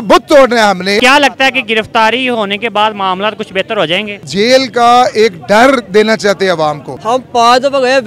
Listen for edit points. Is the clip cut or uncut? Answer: cut